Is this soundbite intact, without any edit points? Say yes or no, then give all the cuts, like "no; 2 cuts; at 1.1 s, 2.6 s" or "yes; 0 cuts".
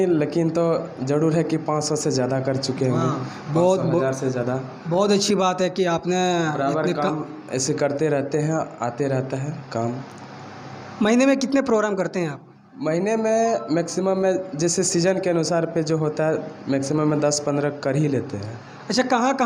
yes; 0 cuts